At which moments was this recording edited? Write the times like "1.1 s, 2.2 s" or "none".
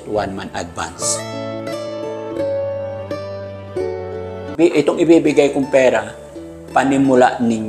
1.0 s, 4.5 s